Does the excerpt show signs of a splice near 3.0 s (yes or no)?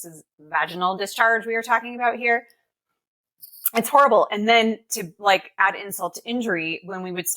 yes